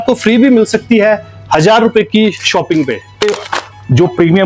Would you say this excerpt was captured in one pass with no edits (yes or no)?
no